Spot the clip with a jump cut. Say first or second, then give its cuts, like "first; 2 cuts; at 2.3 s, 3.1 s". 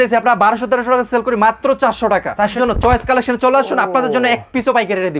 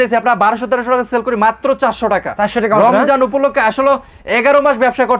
first; 1 cut; at 2.5 s